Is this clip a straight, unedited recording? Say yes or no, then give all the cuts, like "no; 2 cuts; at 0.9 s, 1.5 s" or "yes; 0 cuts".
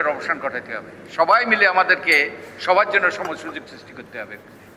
yes; 0 cuts